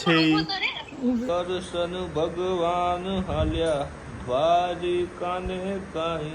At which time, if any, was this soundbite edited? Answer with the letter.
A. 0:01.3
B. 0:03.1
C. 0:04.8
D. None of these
A